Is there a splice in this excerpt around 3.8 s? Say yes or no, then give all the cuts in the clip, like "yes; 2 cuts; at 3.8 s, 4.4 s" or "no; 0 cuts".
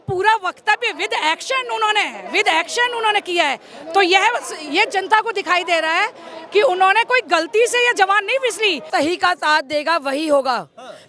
no; 1 cut; at 8.9 s